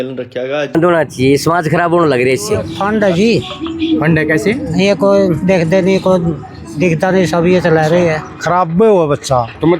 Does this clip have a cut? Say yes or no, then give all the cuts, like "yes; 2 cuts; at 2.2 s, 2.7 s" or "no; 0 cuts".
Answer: yes; 3 cuts; at 0.7 s, 2.7 s, 8.3 s